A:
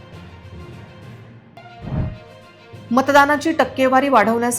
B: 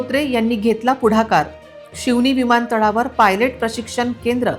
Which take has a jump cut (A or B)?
A